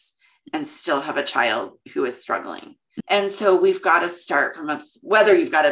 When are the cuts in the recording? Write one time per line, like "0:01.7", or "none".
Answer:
0:02.9